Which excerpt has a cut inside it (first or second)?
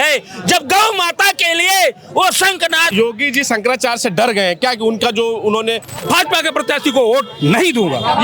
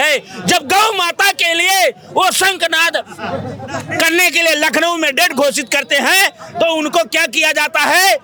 first